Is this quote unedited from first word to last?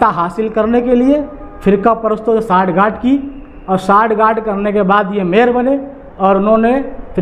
yes; 0 cuts

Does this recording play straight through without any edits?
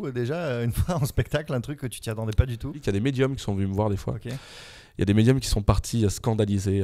no; 1 cut; at 2.8 s

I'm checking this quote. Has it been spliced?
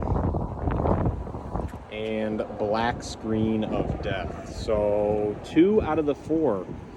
no; 0 cuts

